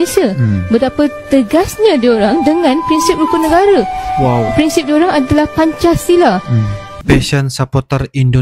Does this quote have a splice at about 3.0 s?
no; 1 cut; at 7.0 s

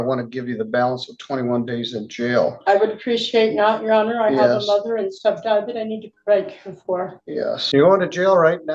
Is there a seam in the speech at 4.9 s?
no; 1 cut; at 7.6 s

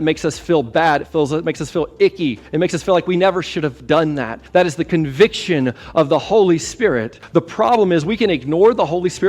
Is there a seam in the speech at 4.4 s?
yes; 3 cuts; at 2.4 s, 4.4 s, 7.1 s

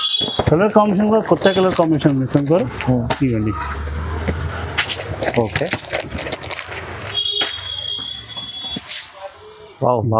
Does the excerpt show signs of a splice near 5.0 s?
no; 1 cut; at 8.9 s

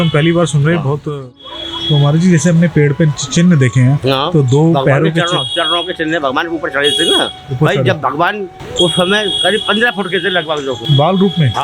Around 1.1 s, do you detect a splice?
yes; 3 cuts; at 1.1 s, 8.6 s, 10.8 s

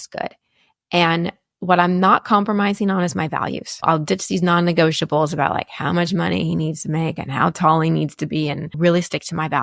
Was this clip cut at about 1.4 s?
no; 2 cuts; at 3.8 s, 8.7 s

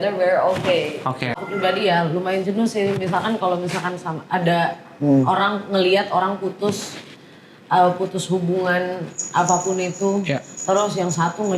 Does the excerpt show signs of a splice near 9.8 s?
no; 1 cut; at 1.4 s

